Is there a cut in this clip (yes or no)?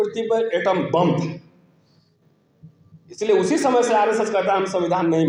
no